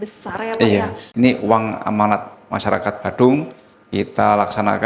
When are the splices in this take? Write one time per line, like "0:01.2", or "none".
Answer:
0:01.0